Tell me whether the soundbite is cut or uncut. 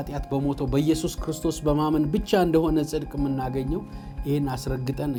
uncut